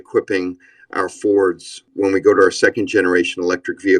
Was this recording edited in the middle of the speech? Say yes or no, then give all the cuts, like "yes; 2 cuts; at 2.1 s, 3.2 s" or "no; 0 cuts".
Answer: yes; 1 cut; at 1.8 s